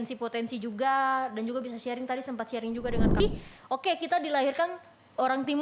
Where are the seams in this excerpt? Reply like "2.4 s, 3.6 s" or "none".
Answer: 3.2 s